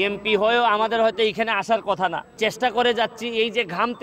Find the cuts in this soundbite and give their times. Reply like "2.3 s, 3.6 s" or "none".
2.3 s

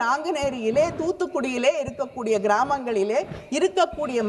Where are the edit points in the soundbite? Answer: none

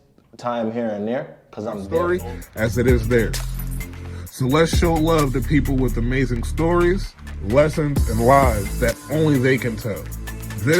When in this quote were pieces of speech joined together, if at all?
1.8 s

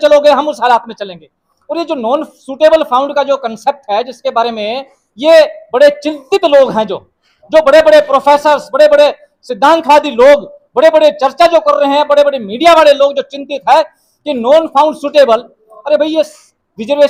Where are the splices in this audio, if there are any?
none

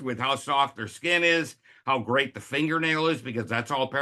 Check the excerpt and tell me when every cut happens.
none

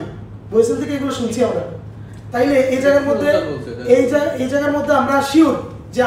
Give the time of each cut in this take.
none

